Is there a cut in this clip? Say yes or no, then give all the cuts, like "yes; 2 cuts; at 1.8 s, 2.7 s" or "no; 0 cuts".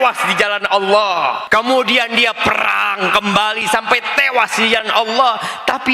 yes; 1 cut; at 1.4 s